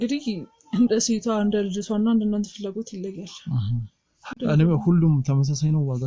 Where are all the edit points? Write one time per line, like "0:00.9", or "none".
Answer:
none

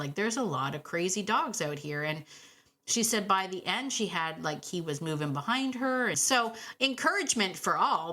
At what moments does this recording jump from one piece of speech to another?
0:06.2

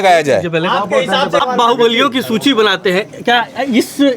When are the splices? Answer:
0:01.4

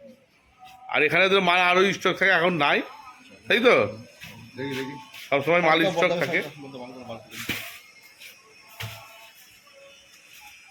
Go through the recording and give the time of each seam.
none

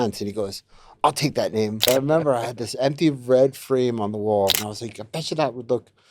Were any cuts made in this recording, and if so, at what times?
0:01.9
0:04.6

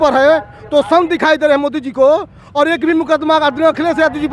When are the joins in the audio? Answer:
none

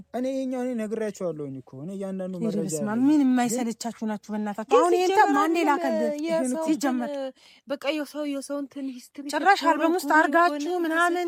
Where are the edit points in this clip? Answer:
none

